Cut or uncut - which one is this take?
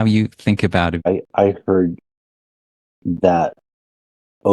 cut